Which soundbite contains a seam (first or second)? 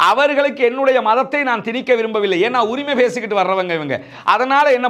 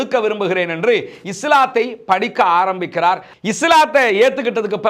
second